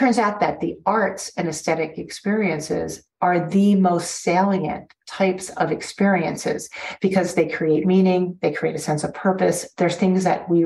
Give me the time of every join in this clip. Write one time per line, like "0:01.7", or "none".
none